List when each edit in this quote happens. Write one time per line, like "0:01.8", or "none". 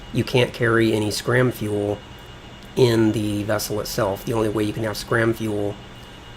0:04.2